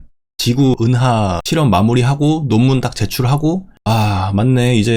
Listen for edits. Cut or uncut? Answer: uncut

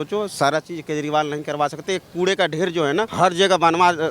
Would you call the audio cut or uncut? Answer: cut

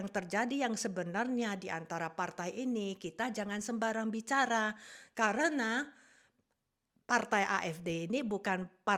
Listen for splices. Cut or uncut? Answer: uncut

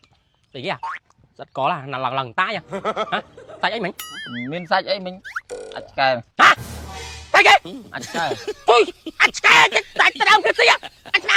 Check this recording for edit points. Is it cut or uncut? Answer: uncut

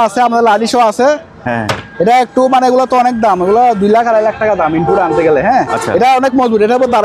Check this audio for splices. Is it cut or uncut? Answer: uncut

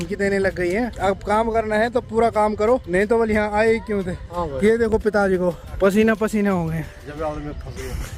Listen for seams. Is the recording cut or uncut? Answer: uncut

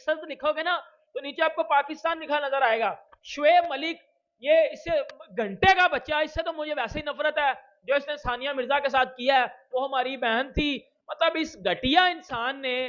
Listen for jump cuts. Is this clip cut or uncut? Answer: uncut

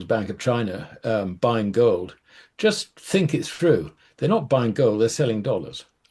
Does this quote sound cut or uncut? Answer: uncut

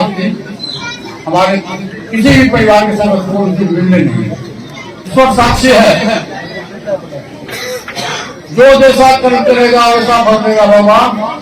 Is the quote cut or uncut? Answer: cut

